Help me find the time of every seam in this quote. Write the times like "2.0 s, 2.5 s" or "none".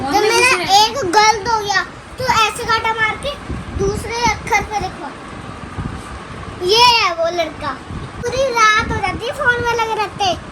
8.3 s

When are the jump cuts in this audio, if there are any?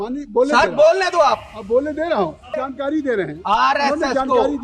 2.6 s

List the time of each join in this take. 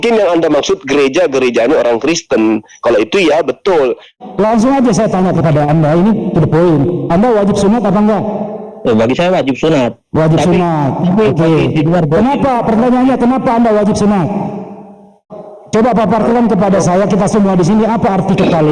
4.2 s, 15.3 s

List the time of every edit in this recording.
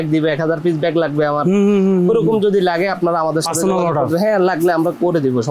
none

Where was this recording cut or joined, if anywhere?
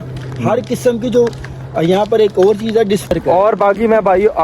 3.1 s

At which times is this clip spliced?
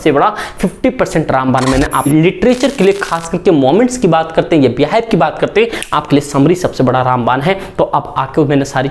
2.1 s

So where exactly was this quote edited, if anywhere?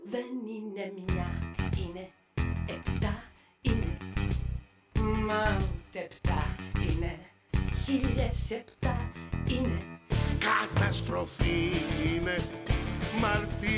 10.0 s

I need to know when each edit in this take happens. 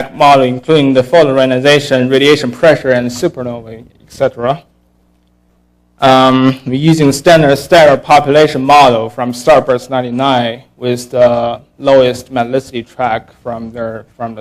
none

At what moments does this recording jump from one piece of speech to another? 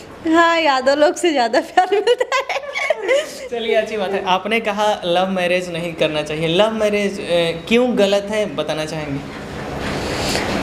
none

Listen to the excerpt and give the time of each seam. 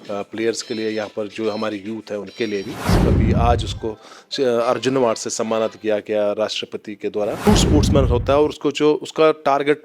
2.9 s, 7.5 s

